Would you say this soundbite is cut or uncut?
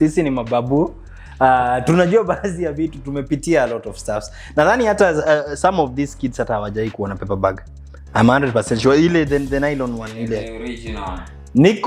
uncut